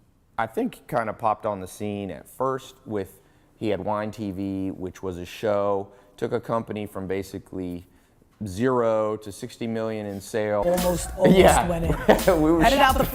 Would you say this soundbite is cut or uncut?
uncut